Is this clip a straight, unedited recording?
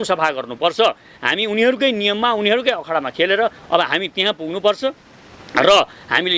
yes; 0 cuts

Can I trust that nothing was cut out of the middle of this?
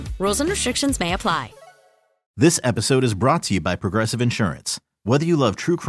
no; 1 cut; at 2.2 s

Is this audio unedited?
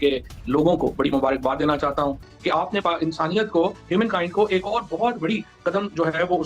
no; 1 cut; at 2.3 s

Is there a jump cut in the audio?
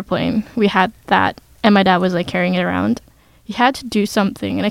no; 0 cuts

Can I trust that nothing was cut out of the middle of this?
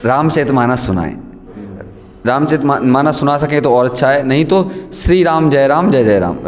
yes; 0 cuts

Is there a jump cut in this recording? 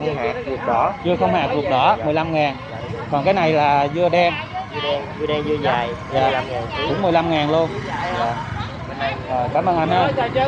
no; 0 cuts

